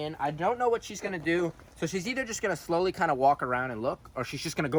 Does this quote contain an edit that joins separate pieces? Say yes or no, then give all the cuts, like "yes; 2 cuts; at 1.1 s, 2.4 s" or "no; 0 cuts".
no; 0 cuts